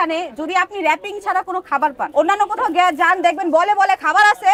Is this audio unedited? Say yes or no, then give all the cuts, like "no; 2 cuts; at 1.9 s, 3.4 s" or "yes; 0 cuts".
yes; 0 cuts